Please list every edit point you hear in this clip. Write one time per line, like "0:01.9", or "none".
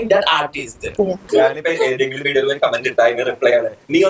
0:01.3